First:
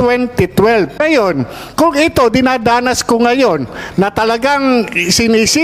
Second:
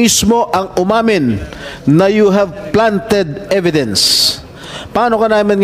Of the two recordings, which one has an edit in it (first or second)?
first